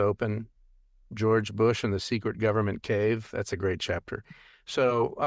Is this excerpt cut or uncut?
uncut